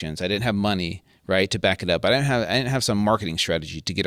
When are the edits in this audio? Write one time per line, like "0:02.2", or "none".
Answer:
none